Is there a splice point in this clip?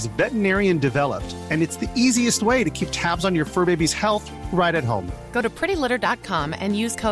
no; 0 cuts

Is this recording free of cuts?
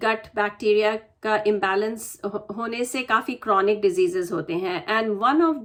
yes; 0 cuts

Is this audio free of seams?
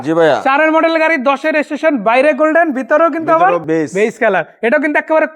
no; 1 cut; at 3.6 s

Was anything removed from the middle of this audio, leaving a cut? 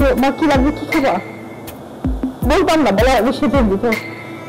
no; 0 cuts

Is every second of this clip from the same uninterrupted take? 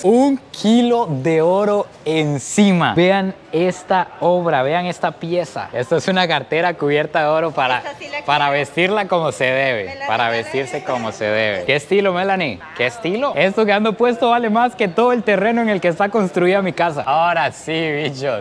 yes; 0 cuts

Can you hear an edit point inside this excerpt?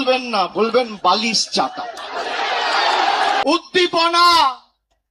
yes; 1 cut; at 3.4 s

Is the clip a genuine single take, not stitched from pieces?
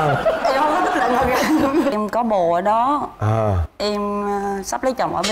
no; 1 cut; at 1.9 s

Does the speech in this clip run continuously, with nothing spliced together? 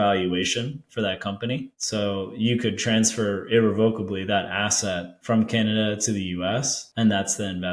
no; 3 cuts; at 1.7 s, 5.1 s, 6.8 s

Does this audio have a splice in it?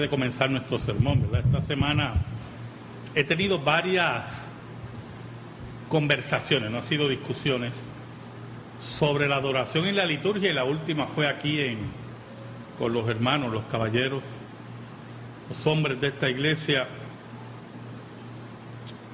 no; 0 cuts

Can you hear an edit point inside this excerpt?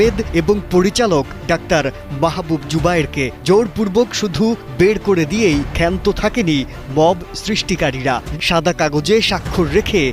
yes; 2 cuts; at 1.3 s, 8.3 s

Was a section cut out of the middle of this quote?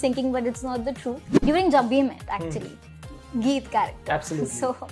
yes; 1 cut; at 1.3 s

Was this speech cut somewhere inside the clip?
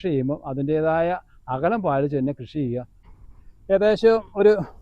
yes; 1 cut; at 3.0 s

